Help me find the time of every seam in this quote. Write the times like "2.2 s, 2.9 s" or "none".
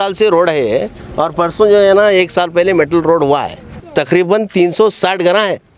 3.8 s